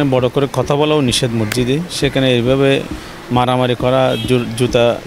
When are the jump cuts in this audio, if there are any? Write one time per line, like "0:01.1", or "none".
none